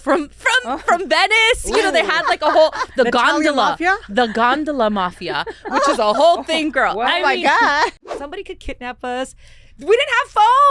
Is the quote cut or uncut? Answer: cut